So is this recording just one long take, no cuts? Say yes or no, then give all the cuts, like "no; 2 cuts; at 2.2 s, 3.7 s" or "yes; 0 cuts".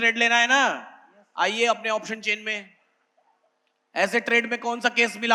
yes; 0 cuts